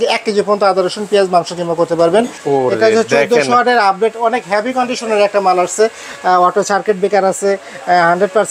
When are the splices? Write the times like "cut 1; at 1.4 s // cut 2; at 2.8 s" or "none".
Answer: cut 1; at 2.4 s